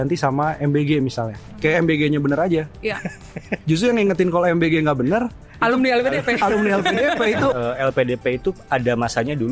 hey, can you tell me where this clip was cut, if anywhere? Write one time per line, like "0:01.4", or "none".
0:01.5
0:07.6